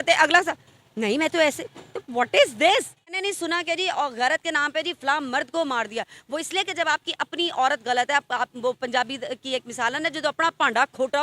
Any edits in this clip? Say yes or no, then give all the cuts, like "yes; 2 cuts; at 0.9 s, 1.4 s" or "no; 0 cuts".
yes; 1 cut; at 3.2 s